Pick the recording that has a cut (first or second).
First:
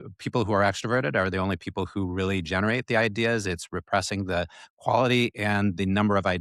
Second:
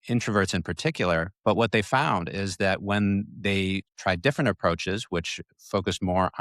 second